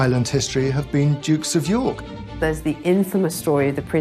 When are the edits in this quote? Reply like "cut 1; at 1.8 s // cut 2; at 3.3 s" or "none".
cut 1; at 2.0 s

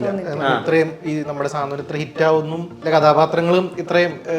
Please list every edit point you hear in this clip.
cut 1; at 2.9 s

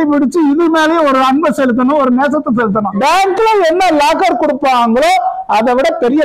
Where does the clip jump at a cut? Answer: cut 1; at 2.9 s

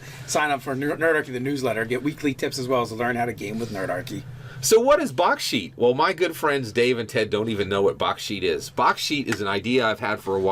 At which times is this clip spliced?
cut 1; at 8.9 s

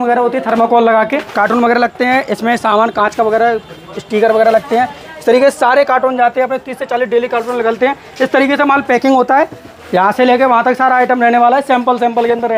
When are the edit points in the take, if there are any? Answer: cut 1; at 1.3 s // cut 2; at 9.7 s

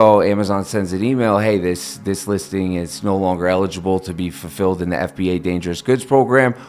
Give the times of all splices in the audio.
none

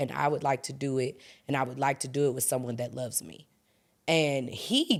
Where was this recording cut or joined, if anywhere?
none

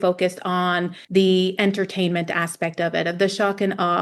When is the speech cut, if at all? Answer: cut 1; at 1.0 s

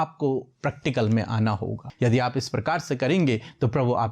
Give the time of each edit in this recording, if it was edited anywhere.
cut 1; at 1.8 s

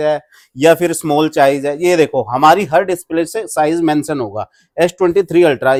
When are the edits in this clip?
none

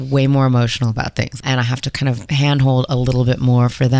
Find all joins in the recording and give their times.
cut 1; at 1.4 s

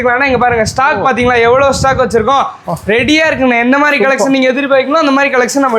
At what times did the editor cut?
none

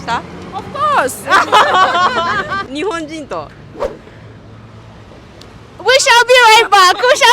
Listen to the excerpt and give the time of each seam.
cut 1; at 2.7 s

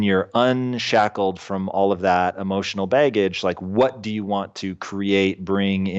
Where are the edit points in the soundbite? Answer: none

